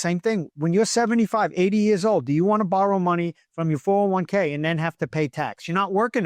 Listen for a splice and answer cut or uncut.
uncut